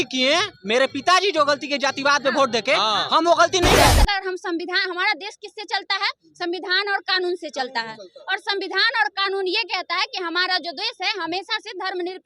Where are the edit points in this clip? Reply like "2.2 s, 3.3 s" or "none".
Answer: 3.9 s

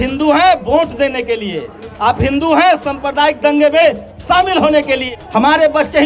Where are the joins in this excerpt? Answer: 5.0 s

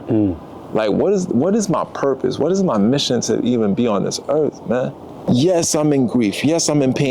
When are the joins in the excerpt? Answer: 5.3 s

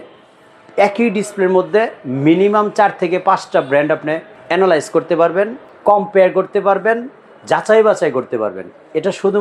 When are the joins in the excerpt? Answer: 4.3 s, 5.6 s

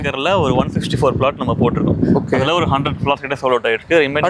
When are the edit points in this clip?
none

